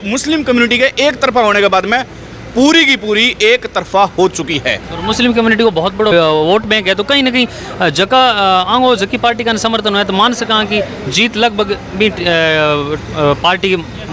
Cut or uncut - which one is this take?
uncut